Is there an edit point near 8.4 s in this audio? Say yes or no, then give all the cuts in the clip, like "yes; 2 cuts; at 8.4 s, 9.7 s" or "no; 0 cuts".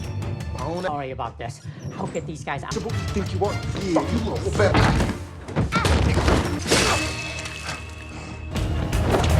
yes; 1 cut; at 8.4 s